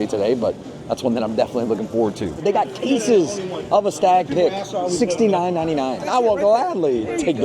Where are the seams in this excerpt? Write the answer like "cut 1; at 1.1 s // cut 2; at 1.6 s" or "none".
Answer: cut 1; at 2.4 s // cut 2; at 6.1 s